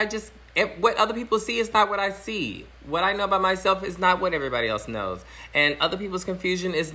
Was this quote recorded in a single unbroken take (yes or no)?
yes